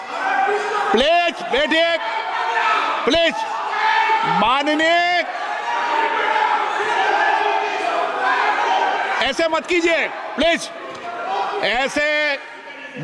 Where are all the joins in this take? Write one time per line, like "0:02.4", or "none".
none